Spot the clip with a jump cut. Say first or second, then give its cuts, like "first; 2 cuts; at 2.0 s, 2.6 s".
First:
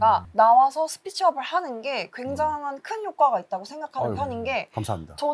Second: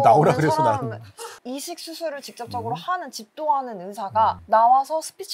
second; 1 cut; at 1.4 s